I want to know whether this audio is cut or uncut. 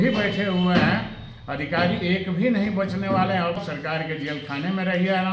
cut